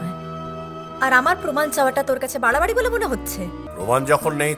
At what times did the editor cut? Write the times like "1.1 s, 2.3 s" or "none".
3.6 s